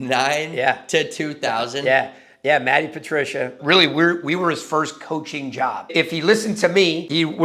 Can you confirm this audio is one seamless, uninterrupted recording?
no; 2 cuts; at 3.6 s, 5.8 s

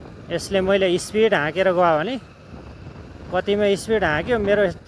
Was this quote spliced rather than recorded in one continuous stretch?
no; 0 cuts

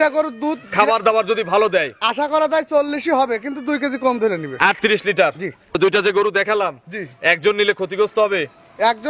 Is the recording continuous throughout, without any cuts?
no; 1 cut; at 5.8 s

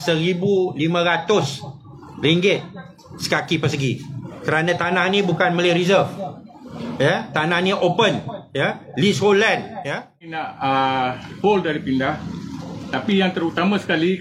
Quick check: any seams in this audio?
yes; 1 cut; at 10.5 s

